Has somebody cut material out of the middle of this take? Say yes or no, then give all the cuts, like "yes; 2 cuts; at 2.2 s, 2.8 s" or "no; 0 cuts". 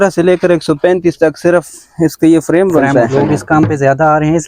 yes; 1 cut; at 3.1 s